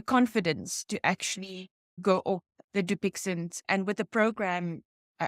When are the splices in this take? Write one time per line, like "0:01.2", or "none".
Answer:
0:01.9